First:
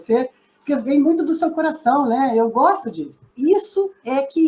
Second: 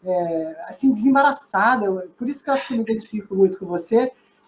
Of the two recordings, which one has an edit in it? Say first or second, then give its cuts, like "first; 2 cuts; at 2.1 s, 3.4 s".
first; 1 cut; at 3.2 s